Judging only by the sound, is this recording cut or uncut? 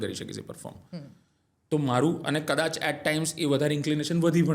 uncut